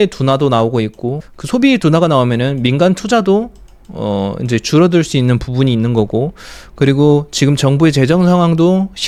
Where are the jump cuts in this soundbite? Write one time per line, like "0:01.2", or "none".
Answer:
none